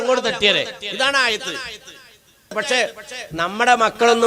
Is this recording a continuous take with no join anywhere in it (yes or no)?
no